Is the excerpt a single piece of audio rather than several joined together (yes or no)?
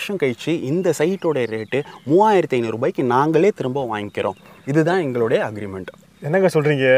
yes